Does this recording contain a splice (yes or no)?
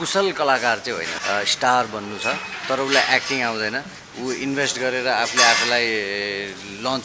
yes